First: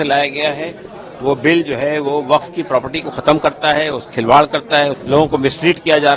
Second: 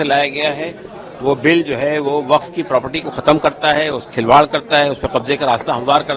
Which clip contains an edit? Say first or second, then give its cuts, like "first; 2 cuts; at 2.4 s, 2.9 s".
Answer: first; 1 cut; at 5.0 s